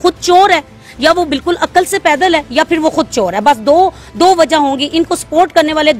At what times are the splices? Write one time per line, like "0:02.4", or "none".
none